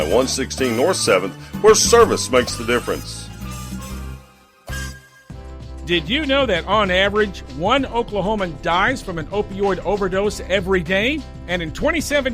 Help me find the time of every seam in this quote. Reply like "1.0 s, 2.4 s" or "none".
5.1 s